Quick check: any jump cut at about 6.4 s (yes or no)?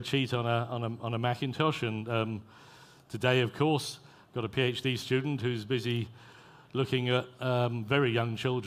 no